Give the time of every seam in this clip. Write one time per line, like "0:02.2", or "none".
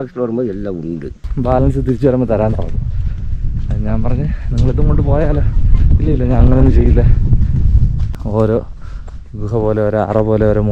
0:01.2
0:08.1

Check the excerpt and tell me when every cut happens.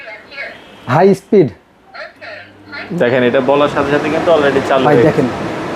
none

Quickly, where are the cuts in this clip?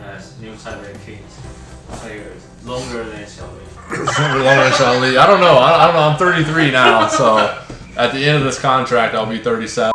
none

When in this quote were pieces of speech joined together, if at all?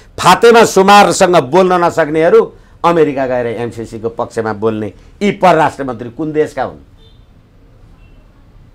none

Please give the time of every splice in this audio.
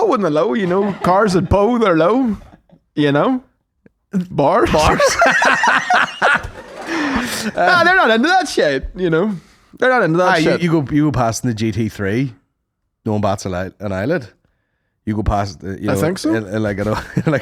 none

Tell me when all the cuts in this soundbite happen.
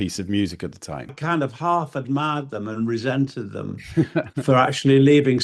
0:01.2

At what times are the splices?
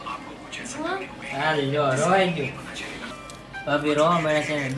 0:03.0

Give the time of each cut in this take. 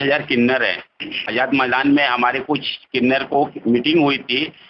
0:01.3

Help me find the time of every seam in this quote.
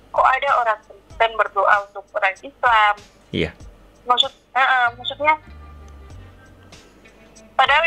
none

